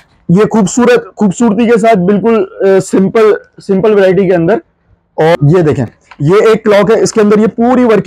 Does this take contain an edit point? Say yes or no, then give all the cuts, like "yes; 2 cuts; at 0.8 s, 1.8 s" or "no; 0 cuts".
yes; 1 cut; at 5.3 s